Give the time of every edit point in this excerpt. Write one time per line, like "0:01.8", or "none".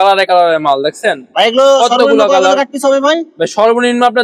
none